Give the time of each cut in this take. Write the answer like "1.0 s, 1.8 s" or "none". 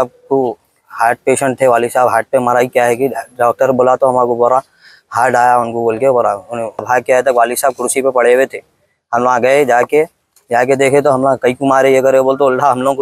6.8 s

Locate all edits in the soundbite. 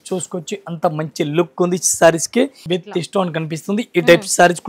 2.6 s

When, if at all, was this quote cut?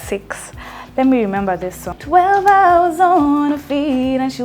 1.9 s

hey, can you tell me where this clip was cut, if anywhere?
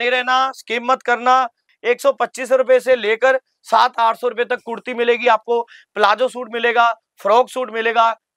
1.6 s

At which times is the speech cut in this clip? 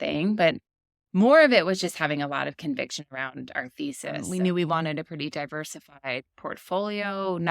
4.2 s

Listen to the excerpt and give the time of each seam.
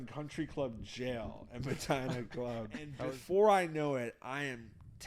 2.9 s

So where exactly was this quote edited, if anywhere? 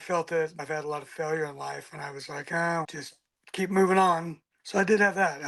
none

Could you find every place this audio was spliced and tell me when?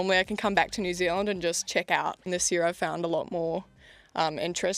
2.2 s

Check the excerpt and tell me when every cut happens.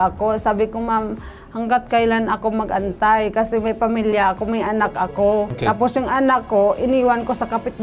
5.5 s

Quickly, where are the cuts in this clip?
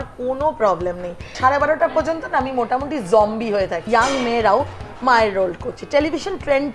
1.4 s, 3.8 s

